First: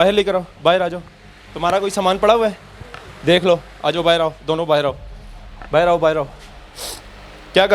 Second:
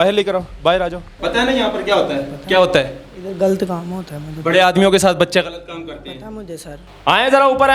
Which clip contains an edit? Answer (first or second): second